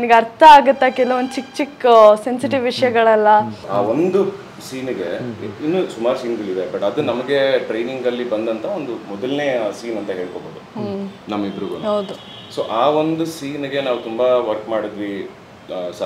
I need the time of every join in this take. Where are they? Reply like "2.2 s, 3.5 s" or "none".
3.6 s